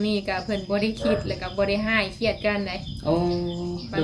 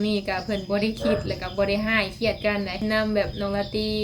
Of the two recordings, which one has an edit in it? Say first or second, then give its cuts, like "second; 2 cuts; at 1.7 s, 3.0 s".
second; 1 cut; at 2.8 s